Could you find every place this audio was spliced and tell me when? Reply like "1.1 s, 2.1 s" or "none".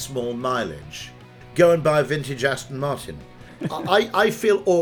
1.3 s, 3.5 s